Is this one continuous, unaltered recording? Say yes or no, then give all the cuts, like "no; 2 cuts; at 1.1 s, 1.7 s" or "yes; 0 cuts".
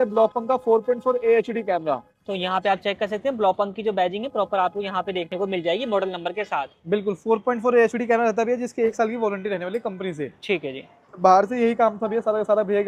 yes; 0 cuts